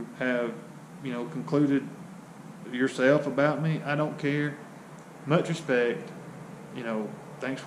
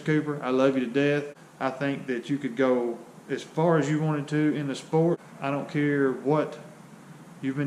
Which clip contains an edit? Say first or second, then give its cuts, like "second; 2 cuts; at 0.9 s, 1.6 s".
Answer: second; 2 cuts; at 1.4 s, 5.3 s